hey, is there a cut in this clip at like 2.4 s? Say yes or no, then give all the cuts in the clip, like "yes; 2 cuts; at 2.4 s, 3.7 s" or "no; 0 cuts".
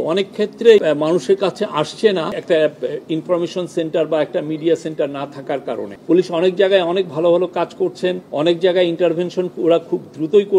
yes; 4 cuts; at 0.8 s, 2.4 s, 5.9 s, 8.2 s